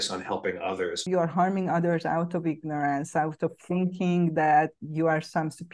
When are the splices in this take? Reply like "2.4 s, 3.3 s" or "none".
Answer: 1.0 s, 4.8 s